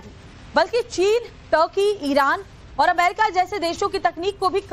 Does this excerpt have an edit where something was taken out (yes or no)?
yes